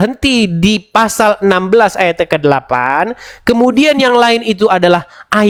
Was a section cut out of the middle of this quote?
no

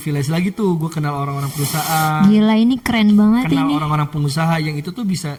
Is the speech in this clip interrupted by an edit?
no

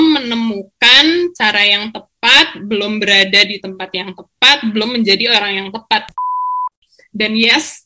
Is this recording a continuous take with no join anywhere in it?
no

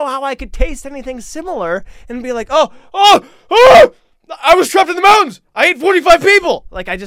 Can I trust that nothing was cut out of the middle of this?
yes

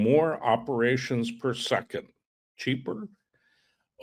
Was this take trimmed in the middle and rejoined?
no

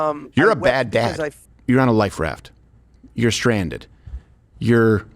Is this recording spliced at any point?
yes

